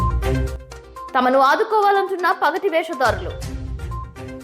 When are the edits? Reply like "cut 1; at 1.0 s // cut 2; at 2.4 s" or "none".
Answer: cut 1; at 1.0 s